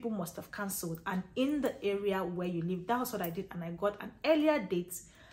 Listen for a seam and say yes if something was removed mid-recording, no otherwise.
no